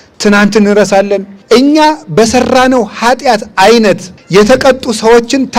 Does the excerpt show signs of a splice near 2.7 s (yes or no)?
no